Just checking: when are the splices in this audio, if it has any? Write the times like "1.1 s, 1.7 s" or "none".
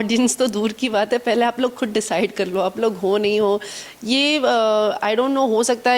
none